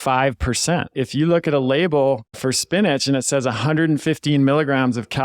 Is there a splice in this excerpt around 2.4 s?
yes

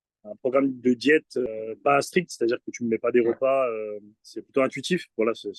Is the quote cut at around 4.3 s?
no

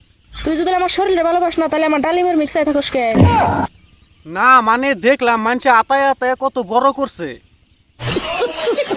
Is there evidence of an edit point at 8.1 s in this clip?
yes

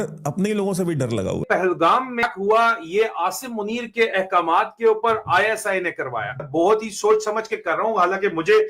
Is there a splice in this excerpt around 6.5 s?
yes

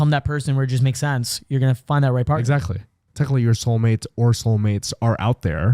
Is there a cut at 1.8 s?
no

